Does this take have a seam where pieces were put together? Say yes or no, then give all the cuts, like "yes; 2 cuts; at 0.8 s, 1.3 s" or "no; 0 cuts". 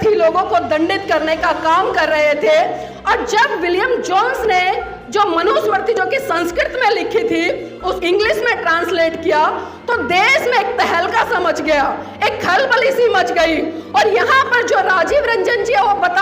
yes; 1 cut; at 8.0 s